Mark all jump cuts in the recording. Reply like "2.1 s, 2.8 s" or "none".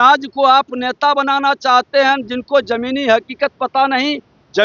none